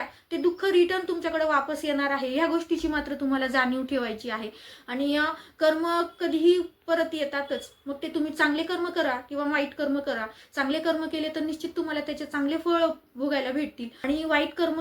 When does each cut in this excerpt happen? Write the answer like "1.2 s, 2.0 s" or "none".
13.9 s